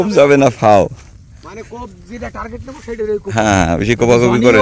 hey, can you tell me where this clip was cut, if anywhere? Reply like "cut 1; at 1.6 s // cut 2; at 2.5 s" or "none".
none